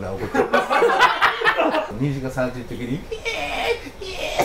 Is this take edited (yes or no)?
yes